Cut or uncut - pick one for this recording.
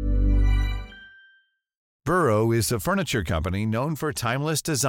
cut